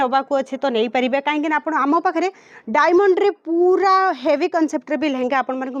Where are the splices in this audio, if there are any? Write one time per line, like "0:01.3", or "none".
none

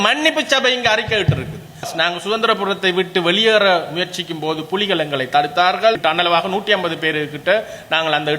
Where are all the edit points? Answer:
0:01.9

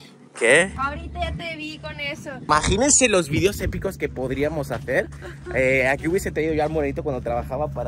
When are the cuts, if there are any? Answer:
0:02.5

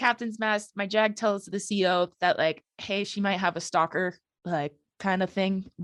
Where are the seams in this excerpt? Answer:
none

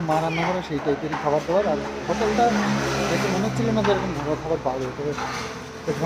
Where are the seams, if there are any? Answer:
none

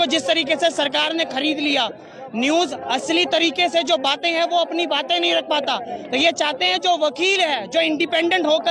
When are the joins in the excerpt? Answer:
none

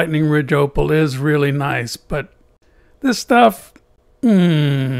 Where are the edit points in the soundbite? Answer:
none

